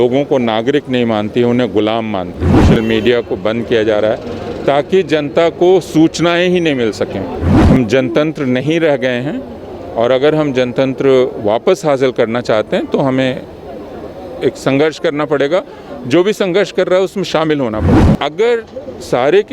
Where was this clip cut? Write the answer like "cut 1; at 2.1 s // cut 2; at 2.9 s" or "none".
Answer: cut 1; at 2.7 s // cut 2; at 7.5 s // cut 3; at 17.9 s